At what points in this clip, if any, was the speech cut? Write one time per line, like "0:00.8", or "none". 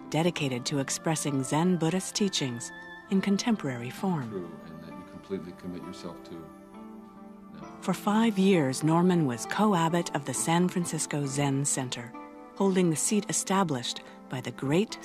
0:03.6